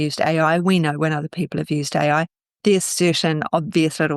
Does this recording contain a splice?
no; 0 cuts

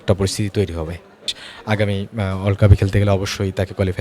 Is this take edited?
yes; 1 cut; at 1.4 s

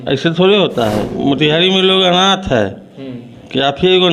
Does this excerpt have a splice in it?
yes; 1 cut; at 1.1 s

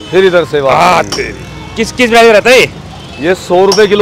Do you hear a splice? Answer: no; 0 cuts

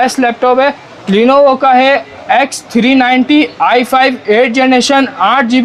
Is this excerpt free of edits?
yes; 0 cuts

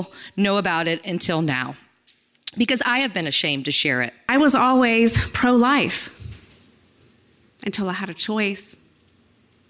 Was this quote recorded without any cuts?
no; 1 cut; at 4.3 s

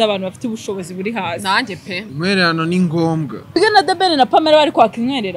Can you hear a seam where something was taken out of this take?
yes; 2 cuts; at 2.0 s, 3.6 s

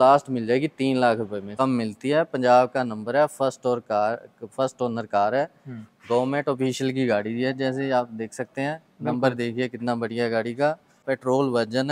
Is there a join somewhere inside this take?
yes; 2 cuts; at 1.5 s, 11.0 s

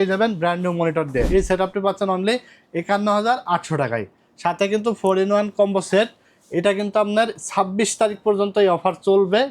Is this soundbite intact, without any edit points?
no; 1 cut; at 1.3 s

